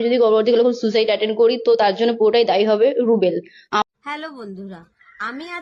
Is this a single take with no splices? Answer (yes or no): no